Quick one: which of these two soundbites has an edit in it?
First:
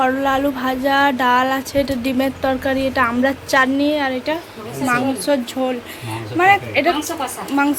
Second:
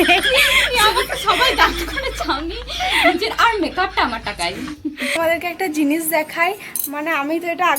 second; 1 cut; at 5.2 s

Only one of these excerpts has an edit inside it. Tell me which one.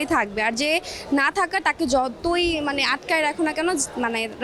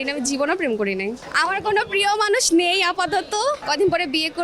second; 2 cuts; at 1.2 s, 3.6 s

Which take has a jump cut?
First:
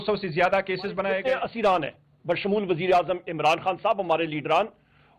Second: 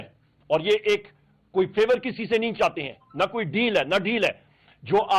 first; 1 cut; at 1.2 s

